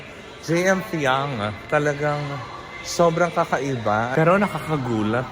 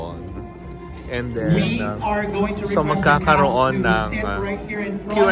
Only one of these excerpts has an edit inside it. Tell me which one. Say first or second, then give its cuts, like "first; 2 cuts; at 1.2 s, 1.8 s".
first; 1 cut; at 4.1 s